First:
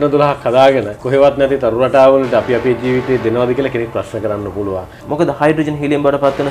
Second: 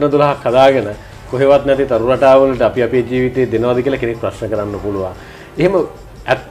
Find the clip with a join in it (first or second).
first